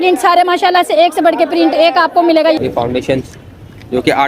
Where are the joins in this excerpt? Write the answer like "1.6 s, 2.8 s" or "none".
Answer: 2.6 s